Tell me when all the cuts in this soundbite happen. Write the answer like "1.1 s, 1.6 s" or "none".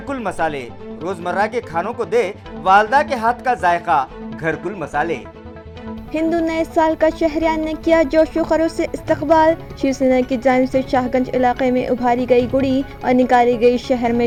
none